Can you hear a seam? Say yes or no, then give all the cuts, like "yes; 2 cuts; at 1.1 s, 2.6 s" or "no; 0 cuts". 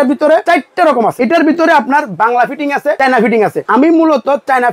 yes; 2 cuts; at 0.9 s, 3.3 s